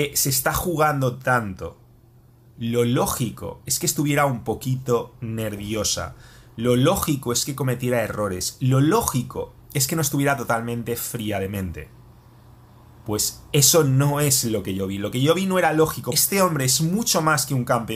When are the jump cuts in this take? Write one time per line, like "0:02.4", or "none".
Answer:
0:16.1